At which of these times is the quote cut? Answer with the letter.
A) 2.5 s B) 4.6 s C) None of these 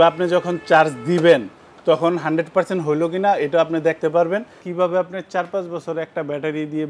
B